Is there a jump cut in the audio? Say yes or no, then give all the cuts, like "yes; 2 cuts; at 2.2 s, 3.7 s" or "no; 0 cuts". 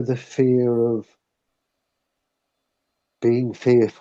no; 0 cuts